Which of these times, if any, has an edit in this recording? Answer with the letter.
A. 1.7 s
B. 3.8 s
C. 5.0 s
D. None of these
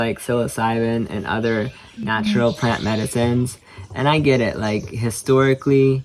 D